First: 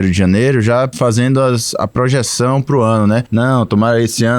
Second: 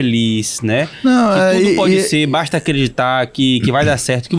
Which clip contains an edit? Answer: first; 2 cuts; at 0.9 s, 3.3 s

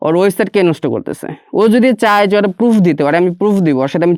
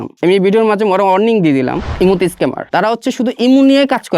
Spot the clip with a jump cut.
second; 2 cuts; at 1.9 s, 2.6 s

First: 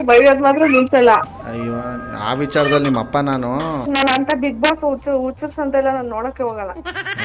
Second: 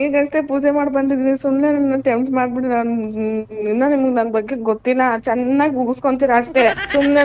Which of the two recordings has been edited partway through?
first; 1 cut; at 3.8 s

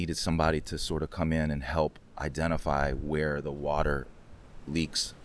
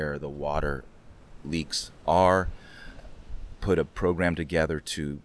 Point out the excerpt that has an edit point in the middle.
second; 1 cut; at 3.0 s

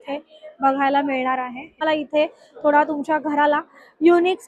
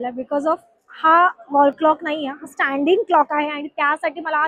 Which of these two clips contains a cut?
first; 1 cut; at 1.8 s

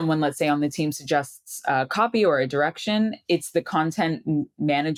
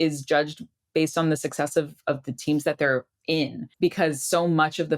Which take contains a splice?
second; 1 cut; at 3.6 s

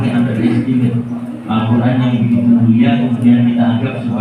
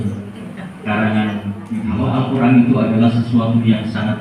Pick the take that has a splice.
second; 1 cut; at 1.7 s

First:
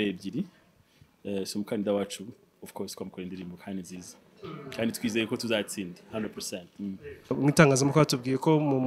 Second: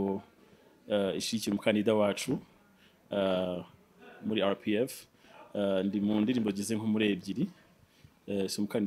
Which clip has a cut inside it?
first; 1 cut; at 7.3 s

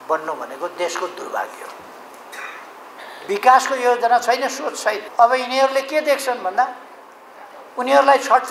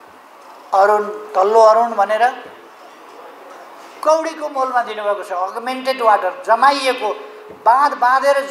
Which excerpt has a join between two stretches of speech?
first; 1 cut; at 5.0 s

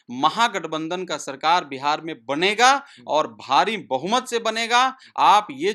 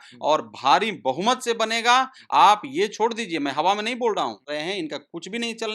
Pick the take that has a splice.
second; 1 cut; at 4.4 s

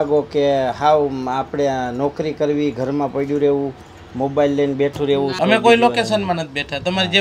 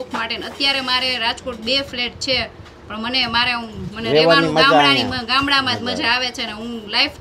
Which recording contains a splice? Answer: first; 1 cut; at 5.4 s

